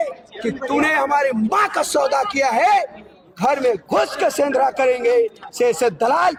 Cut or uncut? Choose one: uncut